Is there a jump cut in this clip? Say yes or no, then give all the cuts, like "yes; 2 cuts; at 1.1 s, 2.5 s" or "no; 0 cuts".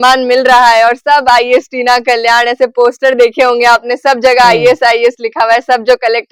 no; 0 cuts